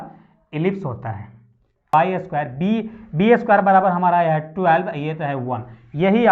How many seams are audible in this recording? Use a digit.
1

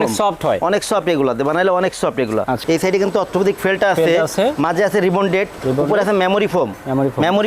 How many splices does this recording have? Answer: 1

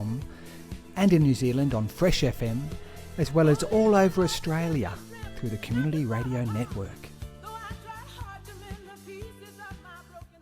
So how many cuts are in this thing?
1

